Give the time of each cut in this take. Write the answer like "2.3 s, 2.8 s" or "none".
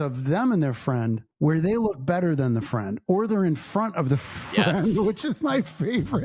none